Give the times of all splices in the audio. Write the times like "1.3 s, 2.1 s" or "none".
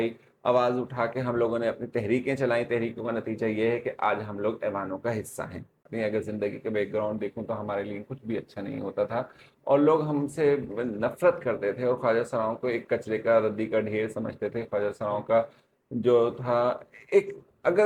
5.9 s